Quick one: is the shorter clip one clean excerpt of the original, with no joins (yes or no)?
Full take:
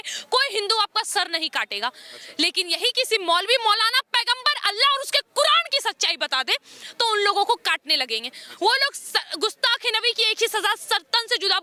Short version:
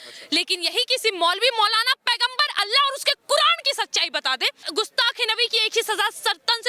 no